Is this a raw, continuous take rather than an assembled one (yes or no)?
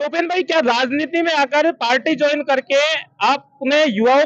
yes